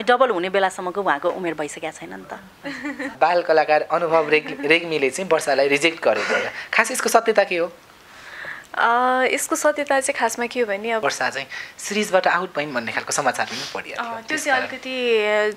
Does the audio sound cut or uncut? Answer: cut